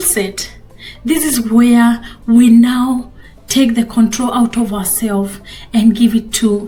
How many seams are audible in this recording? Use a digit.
0